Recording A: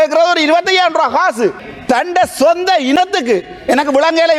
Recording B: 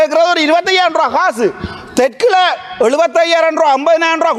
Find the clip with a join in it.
A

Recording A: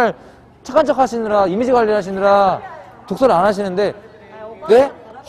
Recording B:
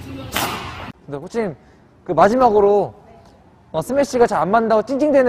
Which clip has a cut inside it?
B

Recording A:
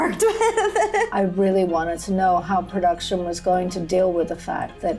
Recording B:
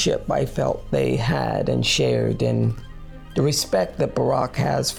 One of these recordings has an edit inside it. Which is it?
A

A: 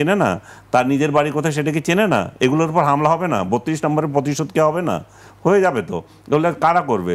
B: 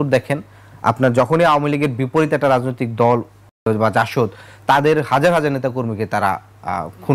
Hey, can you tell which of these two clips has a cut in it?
B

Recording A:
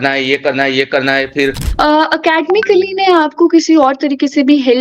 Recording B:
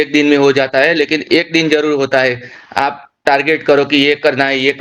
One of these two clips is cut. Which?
A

